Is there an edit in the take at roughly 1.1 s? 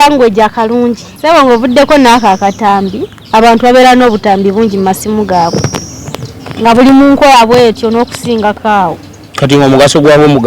yes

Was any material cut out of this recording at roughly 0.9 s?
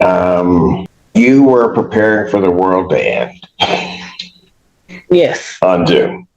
yes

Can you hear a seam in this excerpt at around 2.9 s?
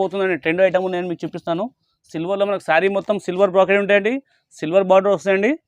no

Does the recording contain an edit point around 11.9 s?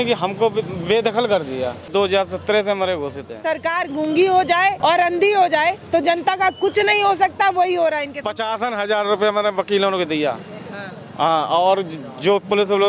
no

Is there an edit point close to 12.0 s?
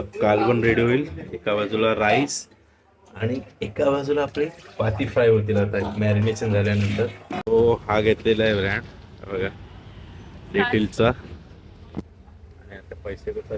no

